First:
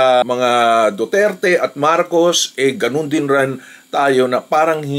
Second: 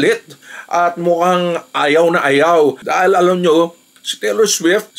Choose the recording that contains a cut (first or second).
second